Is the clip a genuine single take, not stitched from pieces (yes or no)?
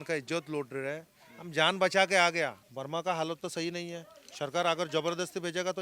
no